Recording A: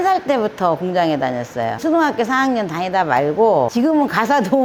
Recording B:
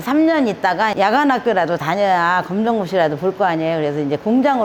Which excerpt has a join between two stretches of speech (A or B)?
A